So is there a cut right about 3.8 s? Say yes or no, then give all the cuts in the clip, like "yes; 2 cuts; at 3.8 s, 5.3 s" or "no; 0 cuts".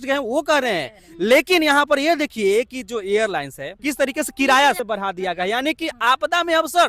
yes; 2 cuts; at 3.8 s, 4.8 s